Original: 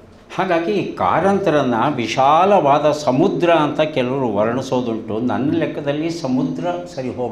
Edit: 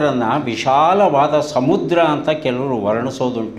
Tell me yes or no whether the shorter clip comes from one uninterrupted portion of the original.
yes